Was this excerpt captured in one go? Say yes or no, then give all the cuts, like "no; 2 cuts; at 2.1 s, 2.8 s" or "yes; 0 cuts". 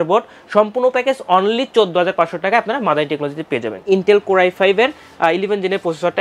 no; 1 cut; at 3.8 s